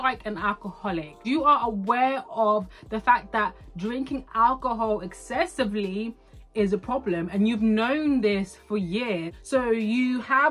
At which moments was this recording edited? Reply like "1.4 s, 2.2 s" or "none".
none